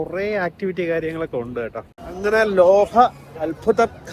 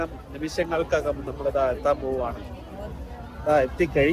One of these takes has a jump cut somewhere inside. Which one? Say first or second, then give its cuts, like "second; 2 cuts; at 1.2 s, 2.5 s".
first; 1 cut; at 2.1 s